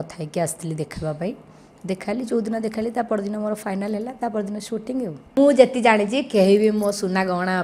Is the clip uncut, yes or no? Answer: no